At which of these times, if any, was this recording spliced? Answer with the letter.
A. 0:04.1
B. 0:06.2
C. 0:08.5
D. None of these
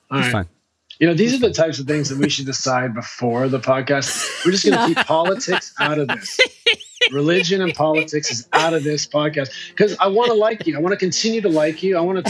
A